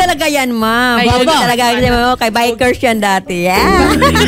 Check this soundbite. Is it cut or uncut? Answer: uncut